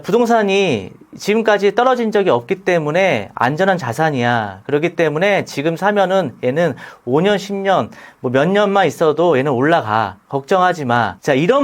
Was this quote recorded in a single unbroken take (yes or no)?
yes